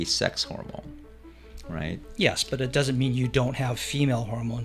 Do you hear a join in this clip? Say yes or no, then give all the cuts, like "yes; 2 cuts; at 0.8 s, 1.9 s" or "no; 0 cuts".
no; 0 cuts